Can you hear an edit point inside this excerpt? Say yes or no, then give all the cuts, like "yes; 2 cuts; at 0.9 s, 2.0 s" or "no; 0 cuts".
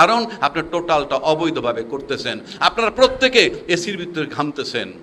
no; 0 cuts